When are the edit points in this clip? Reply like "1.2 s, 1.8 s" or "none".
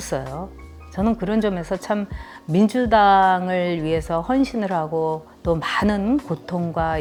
none

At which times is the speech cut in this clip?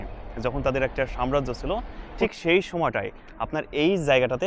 none

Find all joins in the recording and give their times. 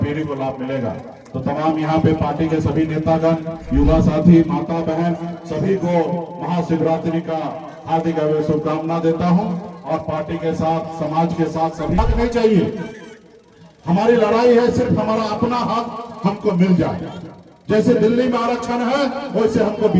12.0 s

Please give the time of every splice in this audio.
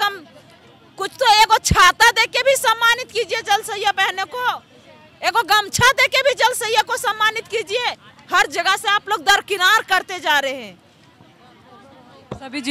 none

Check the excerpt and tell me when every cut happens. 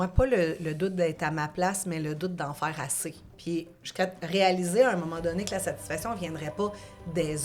3.3 s

